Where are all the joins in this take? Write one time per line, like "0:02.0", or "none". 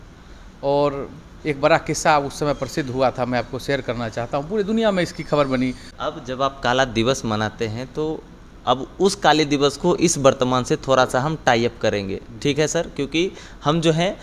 0:05.9